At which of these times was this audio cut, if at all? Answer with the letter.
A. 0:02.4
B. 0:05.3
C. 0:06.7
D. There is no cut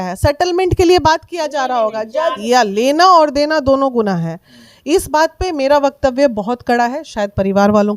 A